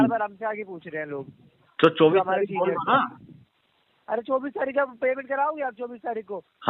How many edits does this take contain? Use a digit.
0